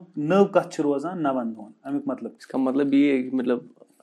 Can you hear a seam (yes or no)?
yes